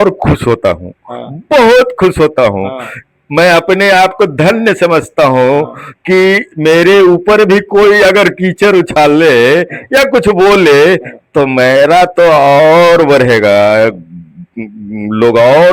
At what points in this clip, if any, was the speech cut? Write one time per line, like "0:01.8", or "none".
none